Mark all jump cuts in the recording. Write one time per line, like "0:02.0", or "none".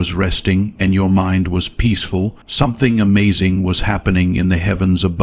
0:02.4